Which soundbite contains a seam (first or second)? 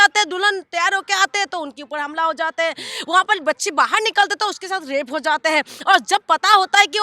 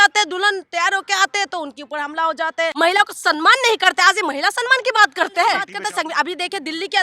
second